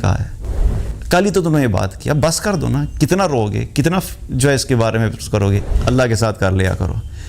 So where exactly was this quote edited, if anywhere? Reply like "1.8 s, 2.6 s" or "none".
5.7 s